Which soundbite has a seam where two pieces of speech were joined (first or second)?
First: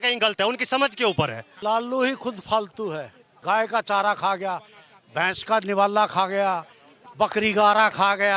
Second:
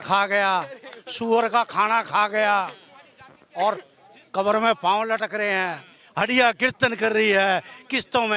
first